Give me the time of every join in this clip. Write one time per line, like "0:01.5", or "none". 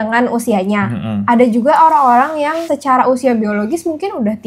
0:02.7